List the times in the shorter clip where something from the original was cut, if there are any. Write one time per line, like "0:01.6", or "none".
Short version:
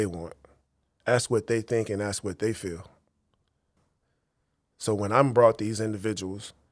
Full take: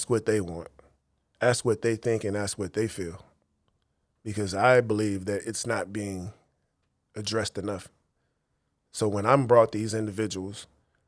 0:03.8